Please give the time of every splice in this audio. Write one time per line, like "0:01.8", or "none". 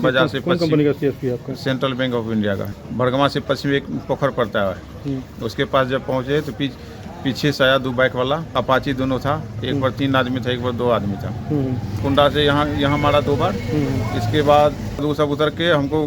0:02.7
0:08.6
0:12.0
0:15.0

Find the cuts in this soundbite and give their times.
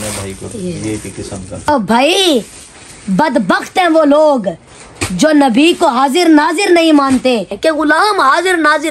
0:01.7
0:07.5

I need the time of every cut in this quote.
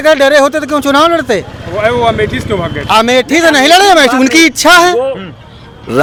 none

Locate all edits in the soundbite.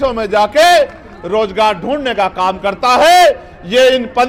none

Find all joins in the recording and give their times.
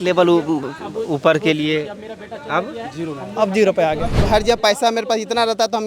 0:04.2

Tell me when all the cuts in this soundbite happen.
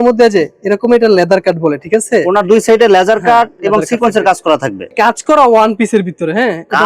0:04.9

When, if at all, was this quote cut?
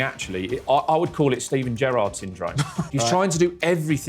0:02.8

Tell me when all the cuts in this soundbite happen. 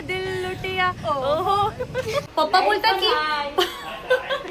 0:02.3

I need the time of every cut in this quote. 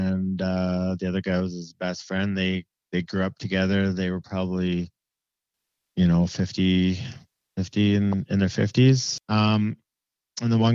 0:09.1

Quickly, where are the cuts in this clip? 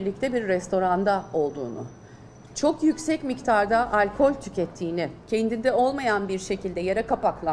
0:05.2

